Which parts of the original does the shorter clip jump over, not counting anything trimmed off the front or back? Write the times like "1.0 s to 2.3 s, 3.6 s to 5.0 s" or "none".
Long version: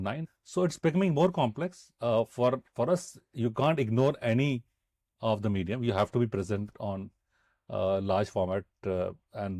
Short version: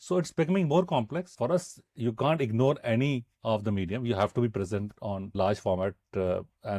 1.8 s to 2.7 s, 4.7 s to 5.1 s, 7.1 s to 8.0 s